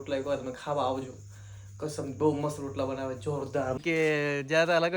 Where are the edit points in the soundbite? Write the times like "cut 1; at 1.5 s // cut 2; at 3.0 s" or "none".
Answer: cut 1; at 3.8 s